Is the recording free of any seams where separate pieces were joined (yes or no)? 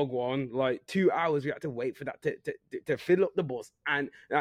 yes